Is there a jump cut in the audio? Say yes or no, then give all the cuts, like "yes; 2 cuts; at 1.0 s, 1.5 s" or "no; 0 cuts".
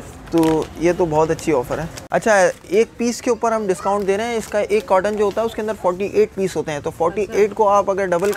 yes; 1 cut; at 2.0 s